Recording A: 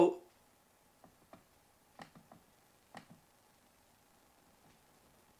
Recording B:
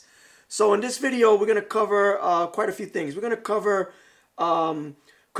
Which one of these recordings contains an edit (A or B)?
B